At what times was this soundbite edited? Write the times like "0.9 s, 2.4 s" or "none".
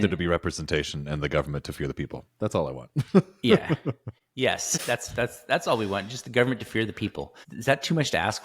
4.7 s, 7.4 s

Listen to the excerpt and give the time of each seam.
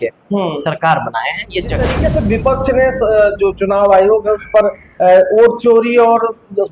1.9 s

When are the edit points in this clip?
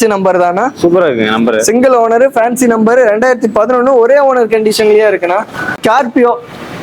5.7 s

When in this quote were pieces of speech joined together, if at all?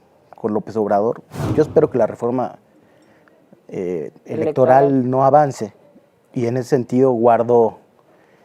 1.5 s

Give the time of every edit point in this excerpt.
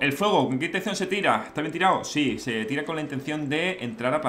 none

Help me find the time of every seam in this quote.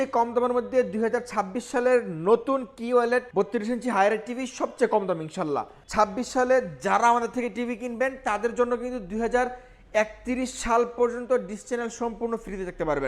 3.3 s, 5.8 s

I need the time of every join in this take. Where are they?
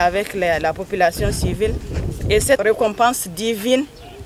2.6 s

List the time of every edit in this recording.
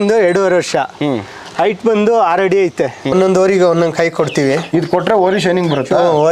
3.1 s

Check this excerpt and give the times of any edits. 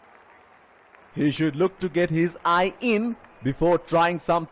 1.1 s

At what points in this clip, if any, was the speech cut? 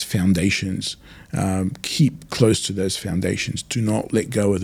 none

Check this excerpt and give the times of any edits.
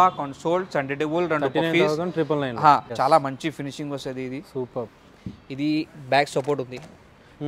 2.9 s

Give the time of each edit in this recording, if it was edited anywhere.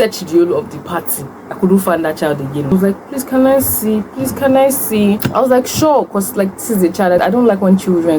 2.7 s, 5.2 s, 7.2 s

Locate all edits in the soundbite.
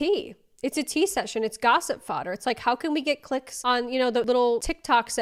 none

